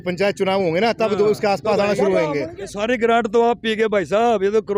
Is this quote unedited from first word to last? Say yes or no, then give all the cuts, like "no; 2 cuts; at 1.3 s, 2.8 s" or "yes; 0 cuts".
no; 1 cut; at 2.6 s